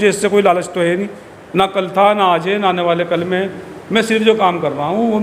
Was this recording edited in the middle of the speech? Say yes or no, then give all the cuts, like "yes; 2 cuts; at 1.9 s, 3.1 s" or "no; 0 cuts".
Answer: no; 0 cuts